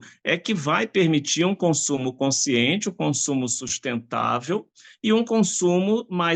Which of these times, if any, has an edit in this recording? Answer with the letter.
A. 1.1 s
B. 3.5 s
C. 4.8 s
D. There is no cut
D